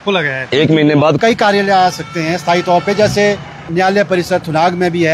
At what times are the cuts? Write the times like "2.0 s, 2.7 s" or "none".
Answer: 1.2 s, 3.7 s